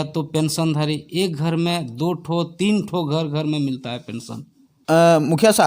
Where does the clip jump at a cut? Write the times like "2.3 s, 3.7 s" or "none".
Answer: 4.7 s